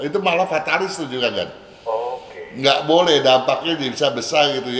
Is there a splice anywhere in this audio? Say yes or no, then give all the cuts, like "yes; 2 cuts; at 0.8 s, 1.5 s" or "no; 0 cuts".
no; 0 cuts